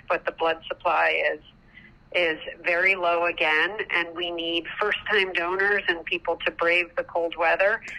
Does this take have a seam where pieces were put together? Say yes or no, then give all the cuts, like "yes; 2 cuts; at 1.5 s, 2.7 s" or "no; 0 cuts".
no; 0 cuts